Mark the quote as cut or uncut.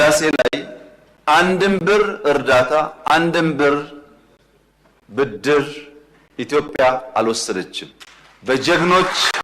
uncut